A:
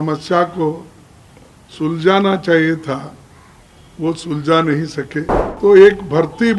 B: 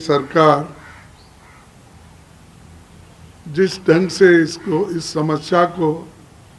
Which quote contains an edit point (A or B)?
A